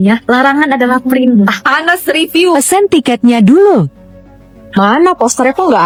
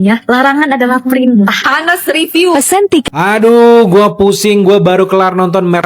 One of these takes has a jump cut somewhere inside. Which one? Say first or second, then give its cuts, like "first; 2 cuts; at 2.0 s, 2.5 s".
second; 1 cut; at 3.1 s